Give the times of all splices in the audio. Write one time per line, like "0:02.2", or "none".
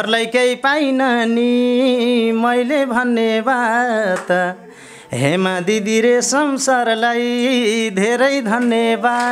none